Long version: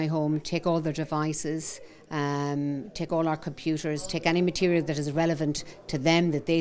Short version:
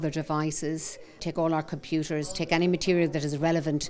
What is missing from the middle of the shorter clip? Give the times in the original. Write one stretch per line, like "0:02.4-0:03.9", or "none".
0:02.0-0:02.9